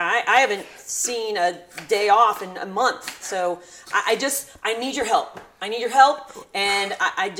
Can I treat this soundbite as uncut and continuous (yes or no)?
yes